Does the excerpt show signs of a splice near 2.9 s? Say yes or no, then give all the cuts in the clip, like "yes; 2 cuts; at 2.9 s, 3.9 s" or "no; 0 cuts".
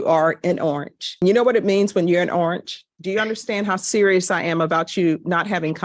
yes; 1 cut; at 2.9 s